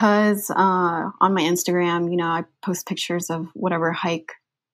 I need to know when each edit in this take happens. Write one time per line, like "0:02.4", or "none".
none